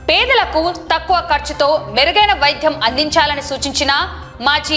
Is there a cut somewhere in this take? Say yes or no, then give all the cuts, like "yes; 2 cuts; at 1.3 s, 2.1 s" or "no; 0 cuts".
no; 0 cuts